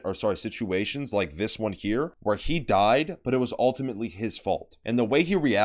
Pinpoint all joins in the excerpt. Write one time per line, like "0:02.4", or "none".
0:02.1
0:04.7